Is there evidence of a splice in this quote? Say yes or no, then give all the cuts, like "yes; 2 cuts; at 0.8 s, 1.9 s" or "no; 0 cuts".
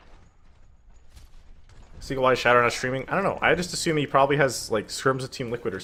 no; 0 cuts